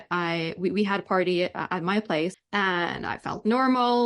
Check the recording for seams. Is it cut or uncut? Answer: cut